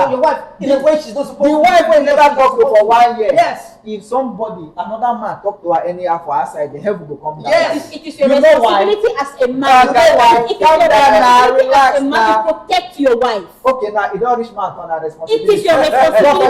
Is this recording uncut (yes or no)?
yes